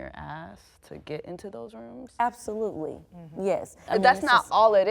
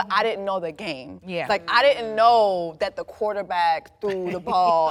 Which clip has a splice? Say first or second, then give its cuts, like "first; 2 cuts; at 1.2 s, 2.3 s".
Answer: first; 1 cut; at 3.7 s